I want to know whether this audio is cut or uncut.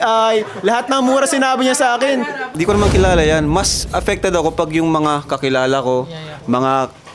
cut